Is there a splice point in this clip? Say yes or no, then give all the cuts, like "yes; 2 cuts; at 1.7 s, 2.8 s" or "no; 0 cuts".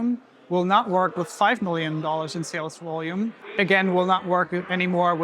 yes; 1 cut; at 3.4 s